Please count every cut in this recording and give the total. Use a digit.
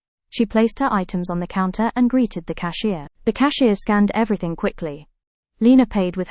0